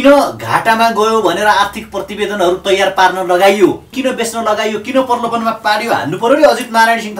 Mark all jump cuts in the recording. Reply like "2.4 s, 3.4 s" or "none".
3.9 s